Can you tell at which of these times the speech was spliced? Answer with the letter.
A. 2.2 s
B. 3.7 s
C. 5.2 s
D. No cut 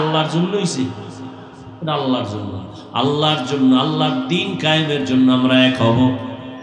D